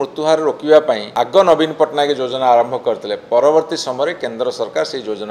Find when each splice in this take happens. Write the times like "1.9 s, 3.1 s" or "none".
1.1 s